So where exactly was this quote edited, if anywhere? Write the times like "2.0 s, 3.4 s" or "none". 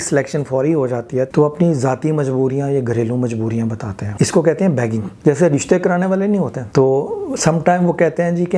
1.3 s, 4.0 s, 5.1 s, 6.6 s